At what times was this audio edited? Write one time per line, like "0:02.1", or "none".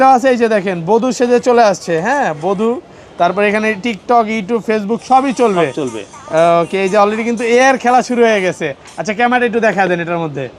none